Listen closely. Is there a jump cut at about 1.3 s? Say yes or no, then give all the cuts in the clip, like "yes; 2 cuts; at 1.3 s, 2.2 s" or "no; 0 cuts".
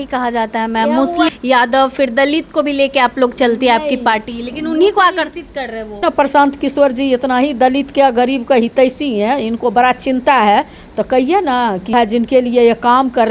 yes; 3 cuts; at 1.3 s, 6.0 s, 11.9 s